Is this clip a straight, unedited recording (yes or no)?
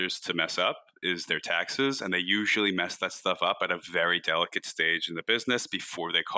yes